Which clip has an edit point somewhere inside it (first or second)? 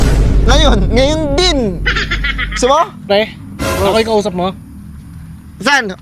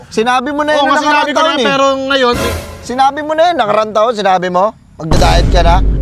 first